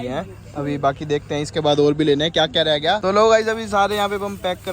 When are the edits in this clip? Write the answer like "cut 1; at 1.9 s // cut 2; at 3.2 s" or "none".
cut 1; at 3.0 s